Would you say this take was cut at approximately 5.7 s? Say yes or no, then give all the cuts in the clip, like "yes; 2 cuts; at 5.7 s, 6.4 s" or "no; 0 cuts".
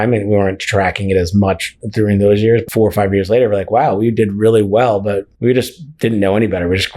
no; 1 cut; at 2.6 s